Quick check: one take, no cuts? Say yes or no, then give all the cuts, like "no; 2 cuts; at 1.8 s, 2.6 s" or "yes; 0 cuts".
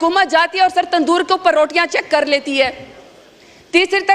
yes; 0 cuts